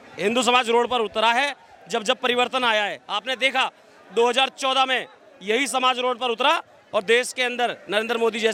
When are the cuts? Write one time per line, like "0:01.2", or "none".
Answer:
none